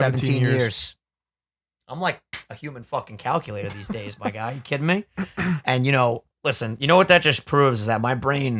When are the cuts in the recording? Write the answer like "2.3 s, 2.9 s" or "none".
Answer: none